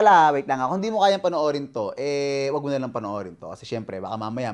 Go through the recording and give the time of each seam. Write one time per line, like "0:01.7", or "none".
none